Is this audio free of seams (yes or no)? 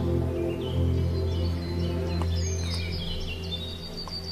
yes